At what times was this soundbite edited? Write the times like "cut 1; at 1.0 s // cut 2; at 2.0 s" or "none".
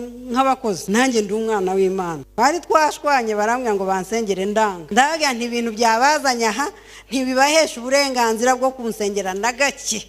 cut 1; at 0.8 s // cut 2; at 2.2 s // cut 3; at 4.8 s